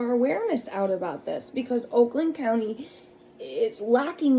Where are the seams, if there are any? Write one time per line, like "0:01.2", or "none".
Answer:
none